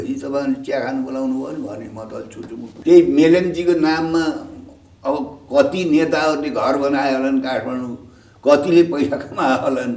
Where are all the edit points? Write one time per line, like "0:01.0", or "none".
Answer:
0:02.7